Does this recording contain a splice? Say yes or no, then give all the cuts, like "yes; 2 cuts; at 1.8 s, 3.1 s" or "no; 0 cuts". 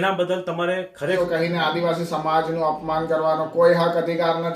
yes; 1 cut; at 1.2 s